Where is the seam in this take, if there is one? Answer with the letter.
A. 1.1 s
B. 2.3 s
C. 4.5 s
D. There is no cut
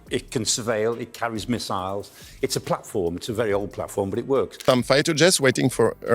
C